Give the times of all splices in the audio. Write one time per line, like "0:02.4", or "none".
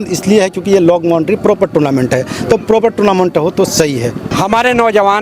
0:04.3